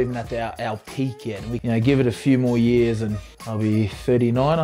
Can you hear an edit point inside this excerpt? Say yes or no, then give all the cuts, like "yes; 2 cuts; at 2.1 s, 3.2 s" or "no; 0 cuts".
yes; 2 cuts; at 1.6 s, 3.3 s